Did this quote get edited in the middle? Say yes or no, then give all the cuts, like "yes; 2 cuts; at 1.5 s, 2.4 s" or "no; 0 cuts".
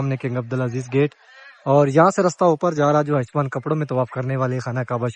no; 0 cuts